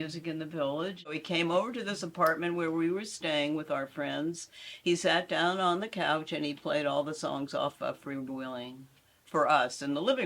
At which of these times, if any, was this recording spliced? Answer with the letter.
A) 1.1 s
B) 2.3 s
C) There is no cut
A